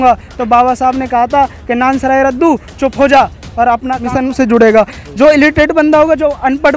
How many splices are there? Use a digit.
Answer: 1